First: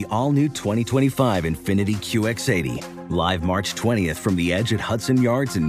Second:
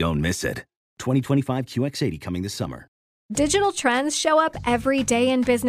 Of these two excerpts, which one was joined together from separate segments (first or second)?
second